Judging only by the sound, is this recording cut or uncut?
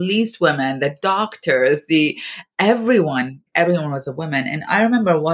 cut